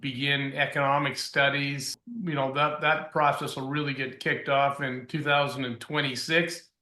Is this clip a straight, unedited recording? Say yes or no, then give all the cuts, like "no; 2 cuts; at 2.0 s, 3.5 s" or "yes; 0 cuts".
no; 1 cut; at 1.9 s